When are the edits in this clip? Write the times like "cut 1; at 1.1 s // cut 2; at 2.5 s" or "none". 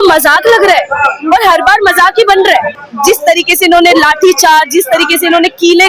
cut 1; at 2.8 s